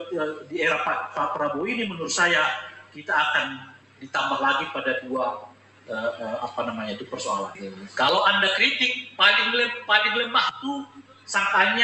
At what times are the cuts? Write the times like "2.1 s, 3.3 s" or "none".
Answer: 7.6 s